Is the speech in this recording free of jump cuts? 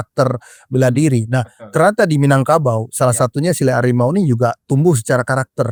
yes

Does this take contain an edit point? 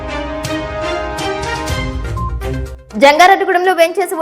yes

